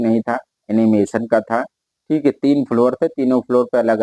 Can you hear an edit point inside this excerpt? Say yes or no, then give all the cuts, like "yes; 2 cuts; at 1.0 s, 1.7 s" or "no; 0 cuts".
no; 0 cuts